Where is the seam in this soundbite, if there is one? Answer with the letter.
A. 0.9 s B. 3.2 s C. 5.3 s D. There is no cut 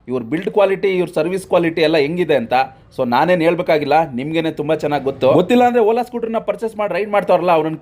C